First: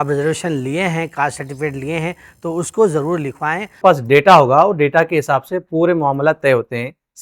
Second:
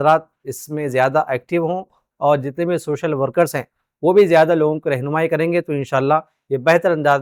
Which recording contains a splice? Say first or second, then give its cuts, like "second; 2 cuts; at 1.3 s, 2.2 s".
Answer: first; 1 cut; at 3.8 s